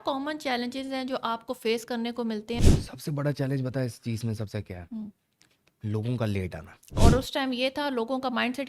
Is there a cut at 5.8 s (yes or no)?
no